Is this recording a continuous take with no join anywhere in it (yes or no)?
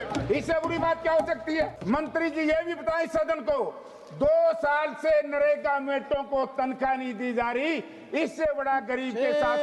no